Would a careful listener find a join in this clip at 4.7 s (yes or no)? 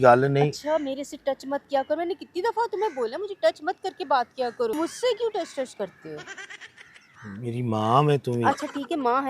yes